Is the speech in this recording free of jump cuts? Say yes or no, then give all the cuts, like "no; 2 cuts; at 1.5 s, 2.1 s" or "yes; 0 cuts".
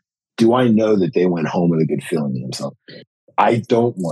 no; 1 cut; at 3.0 s